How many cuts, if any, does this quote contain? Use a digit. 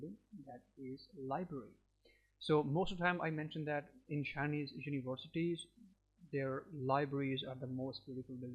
0